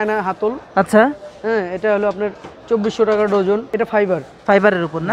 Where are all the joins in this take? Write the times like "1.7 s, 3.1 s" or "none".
3.7 s